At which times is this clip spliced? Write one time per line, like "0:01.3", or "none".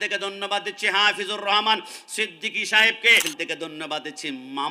0:03.3